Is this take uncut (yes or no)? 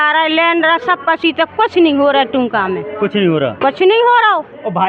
yes